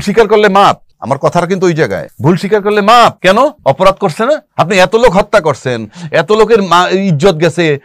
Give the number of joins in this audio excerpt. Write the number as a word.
four